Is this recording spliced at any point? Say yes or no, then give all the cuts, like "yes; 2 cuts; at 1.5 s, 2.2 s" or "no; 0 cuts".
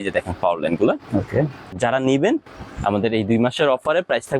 yes; 1 cut; at 1.7 s